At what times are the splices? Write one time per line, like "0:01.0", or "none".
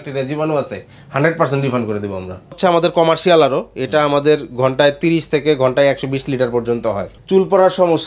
0:02.5
0:07.1